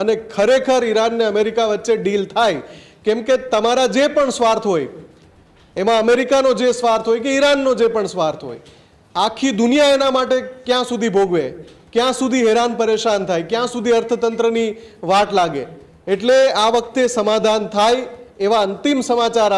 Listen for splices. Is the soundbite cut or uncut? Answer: uncut